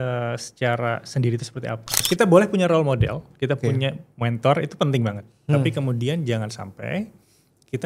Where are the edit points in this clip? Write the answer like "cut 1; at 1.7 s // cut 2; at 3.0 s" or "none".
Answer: cut 1; at 2.0 s